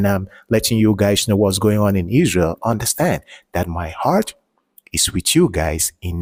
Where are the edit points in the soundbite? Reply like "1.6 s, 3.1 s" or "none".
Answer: none